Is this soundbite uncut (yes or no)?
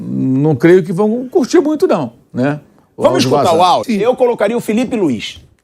no